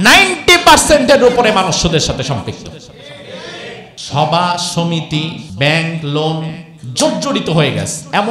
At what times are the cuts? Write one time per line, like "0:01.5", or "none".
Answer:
0:04.0
0:05.4

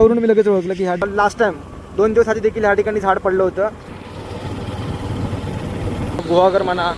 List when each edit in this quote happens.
0:01.0
0:03.9
0:06.2

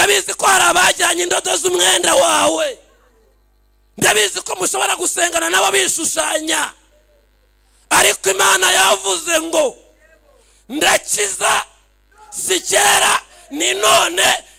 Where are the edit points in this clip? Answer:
none

